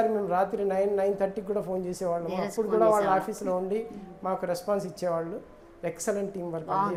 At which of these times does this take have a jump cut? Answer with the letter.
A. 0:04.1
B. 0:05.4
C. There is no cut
C